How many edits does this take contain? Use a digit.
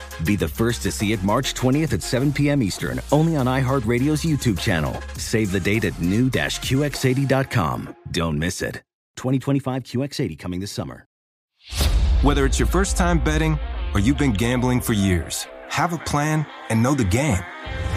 1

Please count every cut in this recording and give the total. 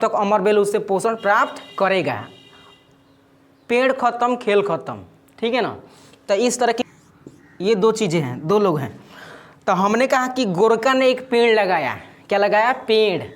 1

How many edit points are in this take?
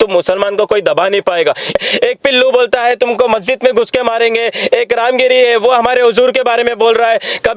1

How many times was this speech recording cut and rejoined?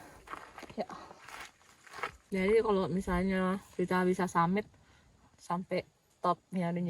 1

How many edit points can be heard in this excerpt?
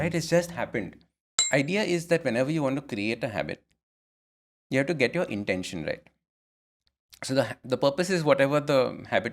1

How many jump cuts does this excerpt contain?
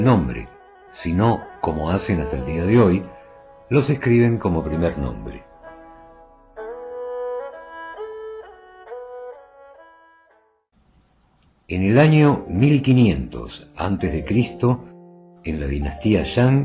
1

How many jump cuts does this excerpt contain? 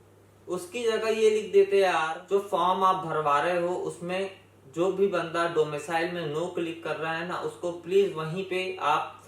1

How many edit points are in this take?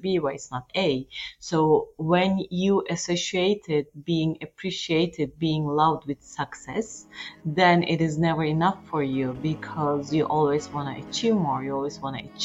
0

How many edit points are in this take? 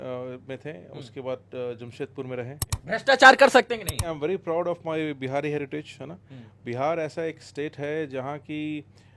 2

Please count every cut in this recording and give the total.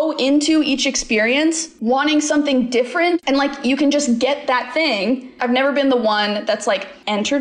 2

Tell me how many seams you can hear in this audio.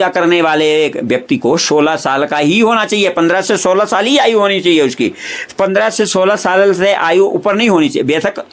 0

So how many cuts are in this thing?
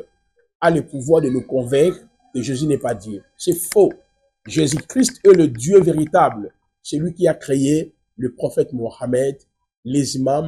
0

